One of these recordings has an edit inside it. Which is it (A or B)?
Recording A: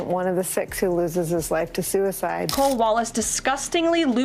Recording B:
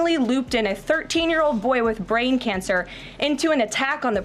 A